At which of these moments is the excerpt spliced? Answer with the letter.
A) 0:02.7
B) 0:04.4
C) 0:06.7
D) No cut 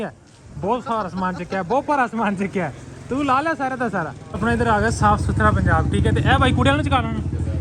B